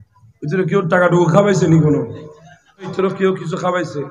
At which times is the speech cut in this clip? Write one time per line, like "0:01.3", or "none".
0:02.9